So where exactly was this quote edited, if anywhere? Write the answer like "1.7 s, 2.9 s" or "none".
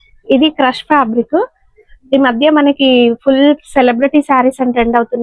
none